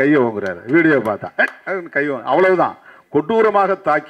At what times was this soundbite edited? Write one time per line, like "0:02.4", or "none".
none